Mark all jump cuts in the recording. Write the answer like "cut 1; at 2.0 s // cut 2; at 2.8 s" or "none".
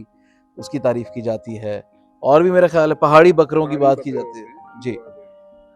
none